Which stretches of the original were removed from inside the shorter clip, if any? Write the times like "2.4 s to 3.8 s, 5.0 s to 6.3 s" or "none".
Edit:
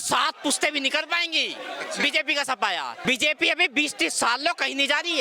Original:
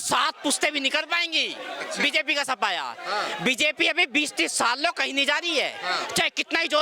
3.0 s to 3.4 s